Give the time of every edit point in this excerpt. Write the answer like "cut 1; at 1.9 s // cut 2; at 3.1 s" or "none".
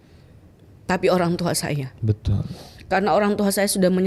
none